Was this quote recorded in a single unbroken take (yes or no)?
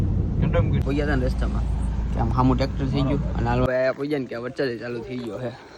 no